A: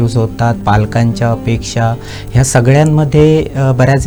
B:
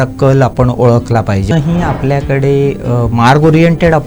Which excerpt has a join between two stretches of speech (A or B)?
B